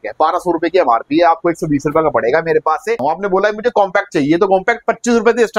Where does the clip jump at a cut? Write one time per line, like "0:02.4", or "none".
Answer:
0:03.0